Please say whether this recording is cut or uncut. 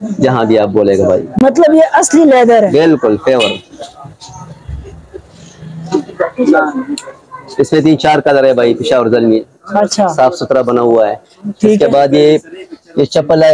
uncut